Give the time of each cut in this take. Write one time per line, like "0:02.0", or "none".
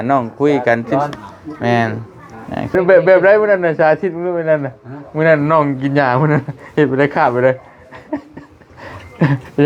0:02.7